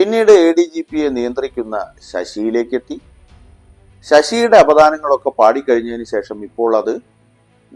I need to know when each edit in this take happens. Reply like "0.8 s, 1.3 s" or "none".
none